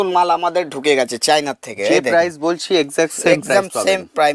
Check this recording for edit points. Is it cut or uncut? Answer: uncut